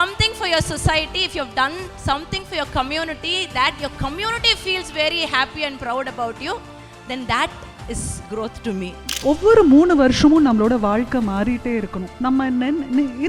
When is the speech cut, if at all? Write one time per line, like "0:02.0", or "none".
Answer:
0:09.0
0:12.0

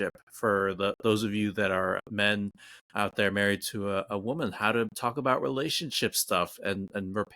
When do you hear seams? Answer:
0:02.0

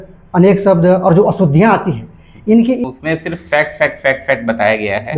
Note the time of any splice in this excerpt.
0:02.8

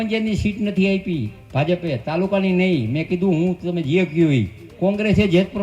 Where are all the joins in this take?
0:04.6

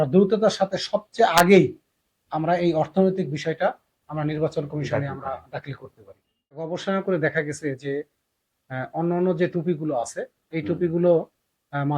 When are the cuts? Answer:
0:06.7

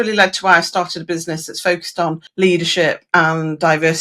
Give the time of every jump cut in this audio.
0:02.2

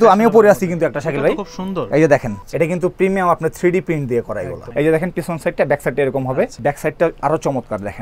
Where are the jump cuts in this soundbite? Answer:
0:02.4
0:04.6
0:06.5

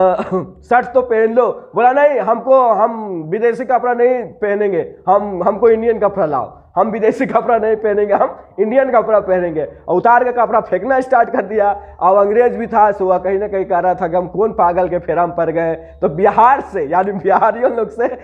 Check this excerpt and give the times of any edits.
none

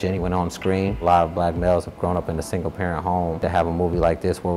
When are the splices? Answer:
0:01.0
0:03.4

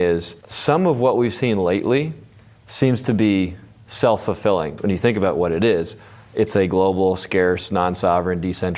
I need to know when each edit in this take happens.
0:04.7

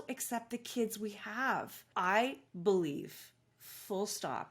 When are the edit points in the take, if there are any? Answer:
0:01.8

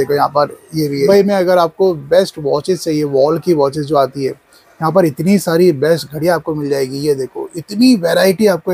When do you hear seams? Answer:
0:01.1

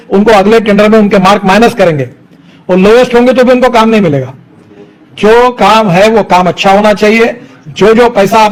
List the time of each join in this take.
none

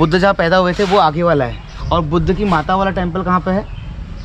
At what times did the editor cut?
none

